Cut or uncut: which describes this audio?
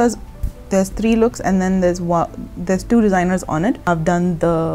cut